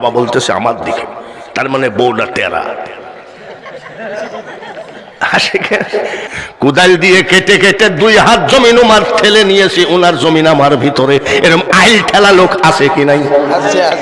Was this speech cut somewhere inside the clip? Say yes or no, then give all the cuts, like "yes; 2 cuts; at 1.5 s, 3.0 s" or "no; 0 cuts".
yes; 1 cut; at 6.3 s